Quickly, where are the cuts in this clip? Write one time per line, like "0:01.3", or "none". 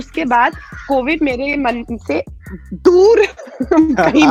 none